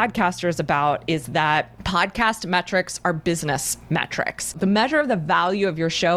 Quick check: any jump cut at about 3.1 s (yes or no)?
no